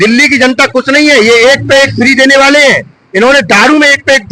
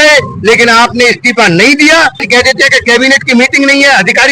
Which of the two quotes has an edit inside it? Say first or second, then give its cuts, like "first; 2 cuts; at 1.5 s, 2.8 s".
second; 1 cut; at 2.3 s